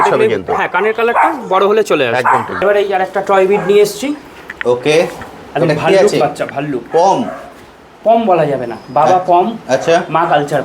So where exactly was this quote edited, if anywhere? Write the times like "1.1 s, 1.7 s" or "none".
2.5 s